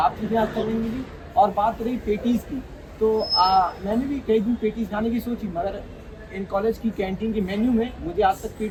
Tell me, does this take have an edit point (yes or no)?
no